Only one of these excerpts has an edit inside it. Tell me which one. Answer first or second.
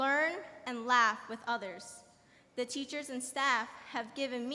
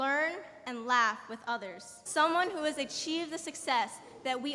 first